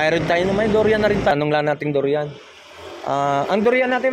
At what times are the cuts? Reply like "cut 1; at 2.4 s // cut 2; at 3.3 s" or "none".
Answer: cut 1; at 1.3 s

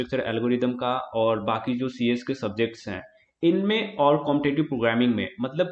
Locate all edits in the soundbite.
none

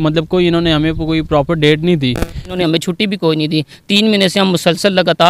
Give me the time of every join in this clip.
cut 1; at 2.5 s

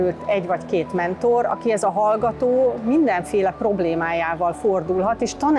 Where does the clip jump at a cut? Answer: none

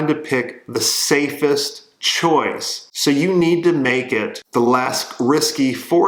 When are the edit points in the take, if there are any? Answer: none

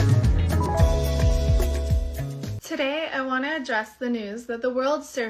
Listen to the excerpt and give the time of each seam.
cut 1; at 2.8 s

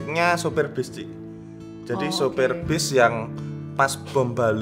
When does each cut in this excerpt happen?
none

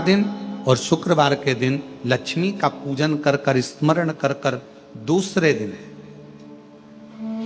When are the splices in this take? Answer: none

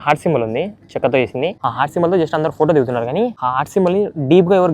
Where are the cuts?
cut 1; at 1.6 s // cut 2; at 3.4 s

